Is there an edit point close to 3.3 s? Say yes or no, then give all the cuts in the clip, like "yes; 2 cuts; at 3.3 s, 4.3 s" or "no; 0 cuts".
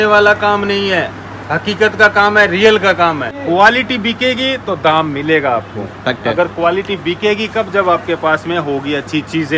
yes; 1 cut; at 3.3 s